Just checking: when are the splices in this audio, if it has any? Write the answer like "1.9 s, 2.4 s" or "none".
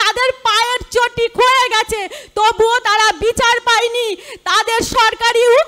none